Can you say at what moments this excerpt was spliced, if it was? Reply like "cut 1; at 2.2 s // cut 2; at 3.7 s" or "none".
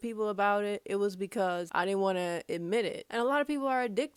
cut 1; at 3.0 s